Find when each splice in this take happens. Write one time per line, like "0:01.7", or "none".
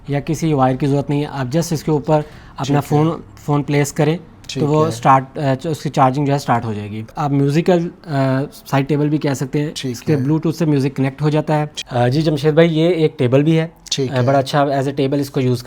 0:07.0
0:11.8